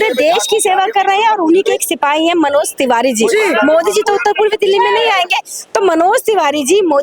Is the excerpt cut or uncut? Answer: uncut